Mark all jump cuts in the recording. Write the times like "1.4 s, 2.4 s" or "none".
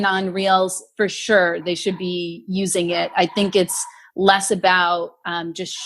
none